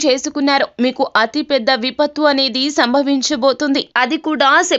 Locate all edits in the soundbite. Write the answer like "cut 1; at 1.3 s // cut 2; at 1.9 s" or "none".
cut 1; at 3.9 s